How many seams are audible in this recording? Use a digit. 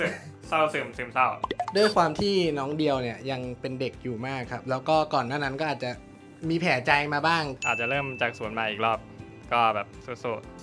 2